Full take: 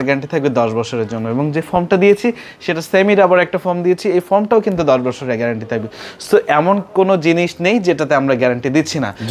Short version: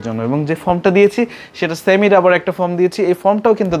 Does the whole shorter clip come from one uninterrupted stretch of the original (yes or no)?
yes